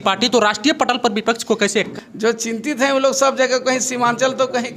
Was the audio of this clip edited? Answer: yes; 1 cut; at 1.9 s

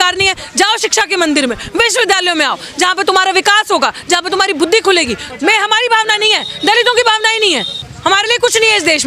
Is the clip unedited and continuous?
no; 2 cuts; at 5.2 s, 7.9 s

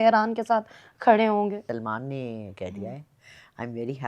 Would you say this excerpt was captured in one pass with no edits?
no; 1 cut; at 1.5 s

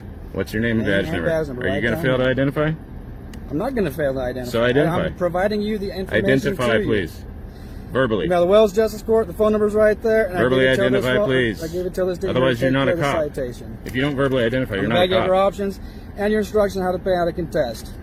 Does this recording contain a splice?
no; 0 cuts

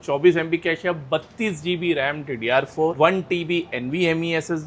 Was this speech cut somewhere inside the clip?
no; 0 cuts

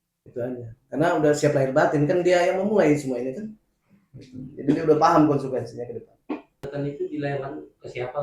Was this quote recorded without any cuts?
no; 1 cut; at 6.6 s

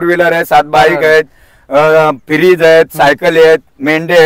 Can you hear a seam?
no; 0 cuts

